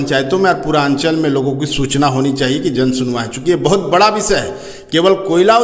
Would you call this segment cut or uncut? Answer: uncut